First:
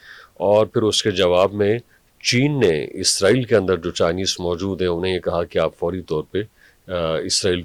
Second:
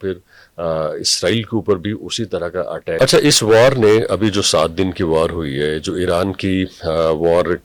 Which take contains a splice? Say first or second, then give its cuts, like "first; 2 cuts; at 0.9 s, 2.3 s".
second; 1 cut; at 3.0 s